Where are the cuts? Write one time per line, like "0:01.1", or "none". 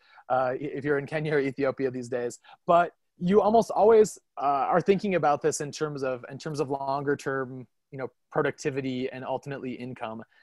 0:03.1
0:04.3